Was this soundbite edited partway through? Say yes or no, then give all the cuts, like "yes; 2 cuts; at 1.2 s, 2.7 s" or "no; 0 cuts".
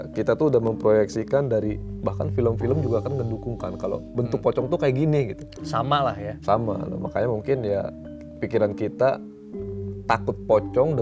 no; 0 cuts